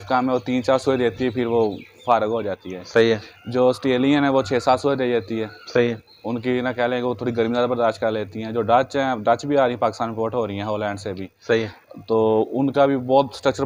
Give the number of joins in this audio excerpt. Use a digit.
0